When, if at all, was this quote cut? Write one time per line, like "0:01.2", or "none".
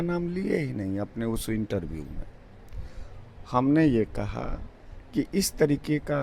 none